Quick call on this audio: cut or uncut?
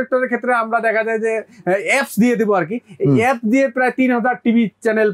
uncut